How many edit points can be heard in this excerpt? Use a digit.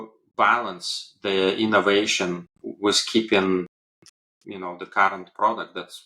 0